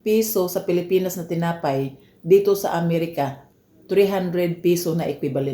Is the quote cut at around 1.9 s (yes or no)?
no